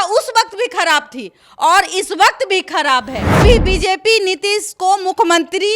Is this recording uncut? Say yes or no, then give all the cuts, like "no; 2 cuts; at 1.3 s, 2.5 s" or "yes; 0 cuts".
no; 1 cut; at 3.4 s